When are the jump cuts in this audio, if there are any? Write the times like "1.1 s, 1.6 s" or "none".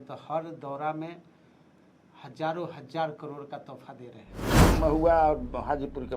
4.6 s